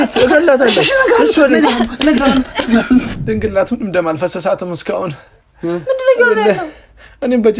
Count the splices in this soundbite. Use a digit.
1